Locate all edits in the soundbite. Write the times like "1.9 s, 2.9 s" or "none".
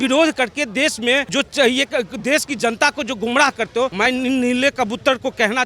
1.3 s, 3.9 s

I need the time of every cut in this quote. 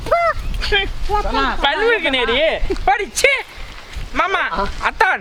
none

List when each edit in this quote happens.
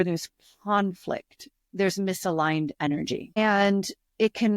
3.4 s

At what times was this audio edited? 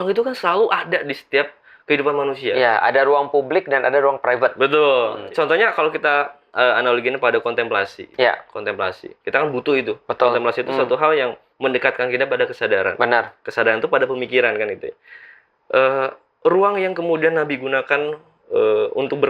5.2 s

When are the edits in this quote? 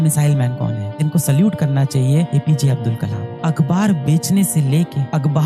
1.0 s

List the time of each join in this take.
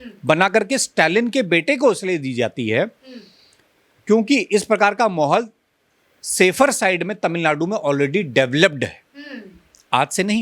none

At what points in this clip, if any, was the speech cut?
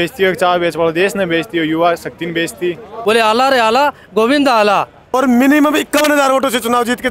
3.0 s, 5.1 s

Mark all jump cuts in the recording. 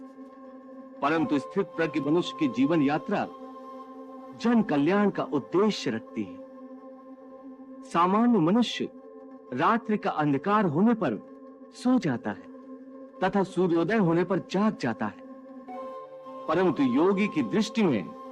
6.5 s, 7.8 s

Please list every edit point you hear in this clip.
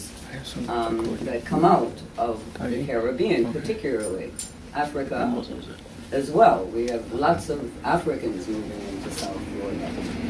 5.5 s

